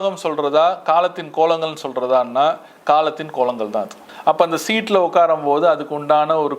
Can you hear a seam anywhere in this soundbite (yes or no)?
yes